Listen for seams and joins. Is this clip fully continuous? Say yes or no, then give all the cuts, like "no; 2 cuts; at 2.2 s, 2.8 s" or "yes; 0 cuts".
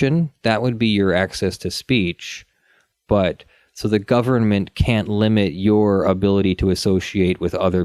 yes; 0 cuts